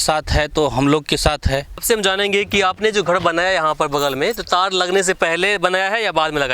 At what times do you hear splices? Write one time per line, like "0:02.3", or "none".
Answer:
0:01.8